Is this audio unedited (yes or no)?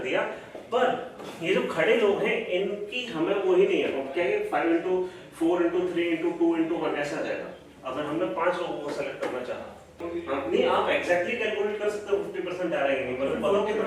no